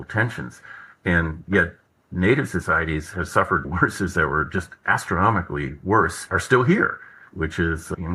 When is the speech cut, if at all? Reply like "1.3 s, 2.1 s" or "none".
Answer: 3.6 s